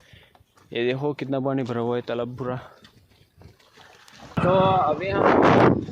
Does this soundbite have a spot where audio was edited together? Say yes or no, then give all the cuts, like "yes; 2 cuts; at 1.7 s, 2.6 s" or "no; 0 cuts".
yes; 1 cut; at 4.3 s